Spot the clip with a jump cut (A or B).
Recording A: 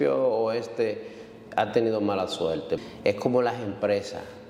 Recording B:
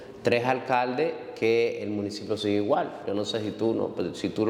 A